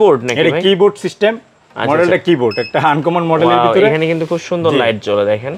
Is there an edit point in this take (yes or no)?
no